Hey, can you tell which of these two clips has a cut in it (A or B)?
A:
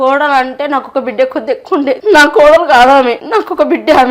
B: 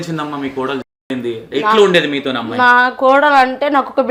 A